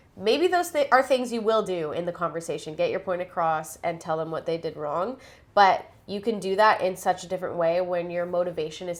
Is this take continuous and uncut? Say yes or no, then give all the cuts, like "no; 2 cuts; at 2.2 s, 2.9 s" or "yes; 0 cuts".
yes; 0 cuts